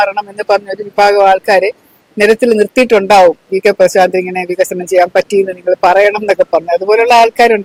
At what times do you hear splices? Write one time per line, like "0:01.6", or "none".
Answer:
none